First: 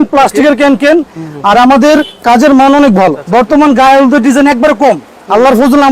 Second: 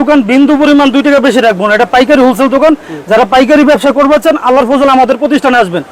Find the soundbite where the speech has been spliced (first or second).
first